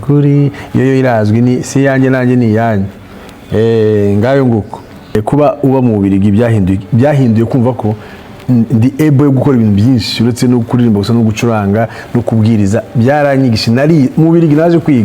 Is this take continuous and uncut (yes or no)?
no